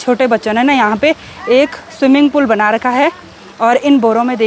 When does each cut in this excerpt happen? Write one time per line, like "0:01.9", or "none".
none